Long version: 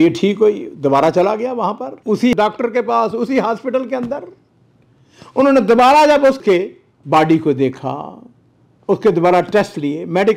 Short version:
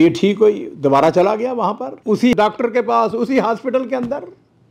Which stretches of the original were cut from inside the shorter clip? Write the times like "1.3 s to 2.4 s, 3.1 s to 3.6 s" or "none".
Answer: none